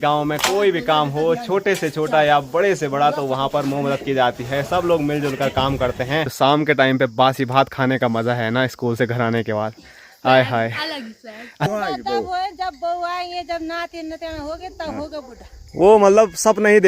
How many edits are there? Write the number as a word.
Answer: two